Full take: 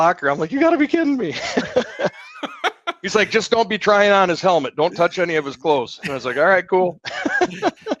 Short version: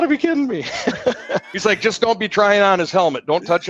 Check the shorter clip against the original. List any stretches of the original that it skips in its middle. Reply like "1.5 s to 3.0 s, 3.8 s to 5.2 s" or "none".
2.2 s to 3.0 s

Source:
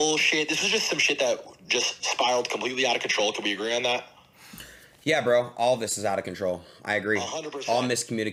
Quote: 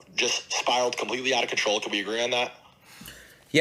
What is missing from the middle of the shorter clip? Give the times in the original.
none

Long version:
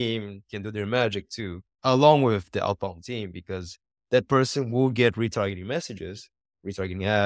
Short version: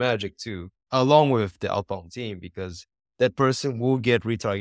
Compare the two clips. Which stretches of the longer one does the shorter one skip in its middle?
none

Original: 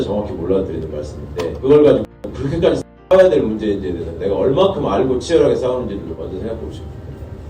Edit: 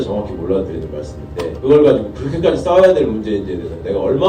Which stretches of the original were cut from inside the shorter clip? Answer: 2.5 s to 2.8 s

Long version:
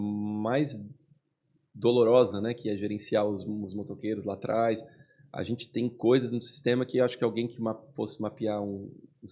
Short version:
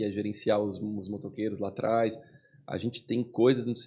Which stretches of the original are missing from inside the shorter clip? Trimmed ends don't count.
none

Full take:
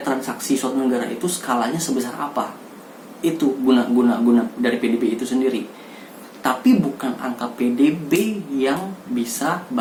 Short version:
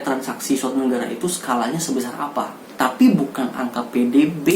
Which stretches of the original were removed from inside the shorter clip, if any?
2.6 s to 6.2 s

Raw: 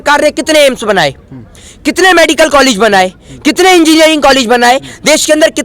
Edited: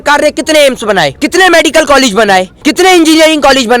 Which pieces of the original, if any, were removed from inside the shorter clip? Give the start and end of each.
1.2 s to 1.8 s, 3.2 s to 3.4 s

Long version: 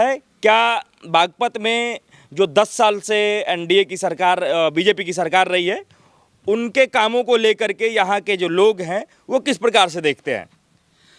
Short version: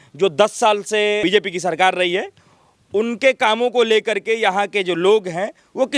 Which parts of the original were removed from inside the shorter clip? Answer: 3.4 s to 4.7 s

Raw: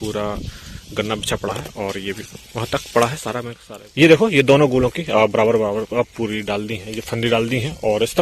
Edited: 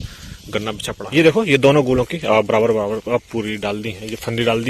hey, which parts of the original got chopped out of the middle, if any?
1.4 s to 3.8 s

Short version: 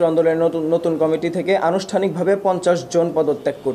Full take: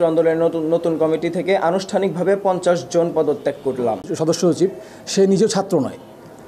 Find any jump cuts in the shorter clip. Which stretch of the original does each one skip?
none

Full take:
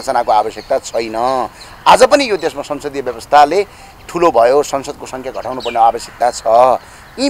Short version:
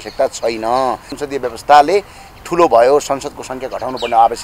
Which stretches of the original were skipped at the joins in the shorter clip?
1.6 s to 2.7 s

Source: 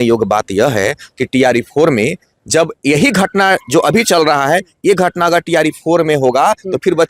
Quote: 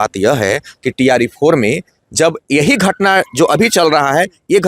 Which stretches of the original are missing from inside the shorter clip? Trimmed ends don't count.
none

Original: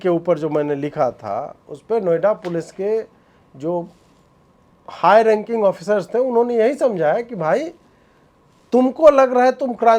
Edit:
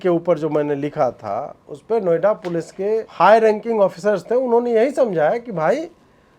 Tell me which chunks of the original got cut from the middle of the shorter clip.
3.1 s to 4.9 s

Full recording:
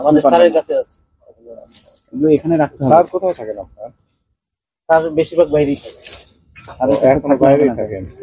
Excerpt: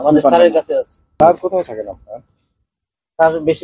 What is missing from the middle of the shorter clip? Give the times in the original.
1.2 s to 2.9 s

